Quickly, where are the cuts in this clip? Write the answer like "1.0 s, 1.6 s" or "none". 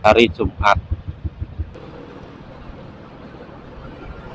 1.7 s